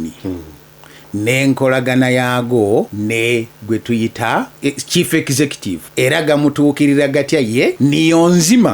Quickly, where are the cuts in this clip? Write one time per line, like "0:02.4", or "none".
0:02.9
0:04.5
0:05.9
0:07.8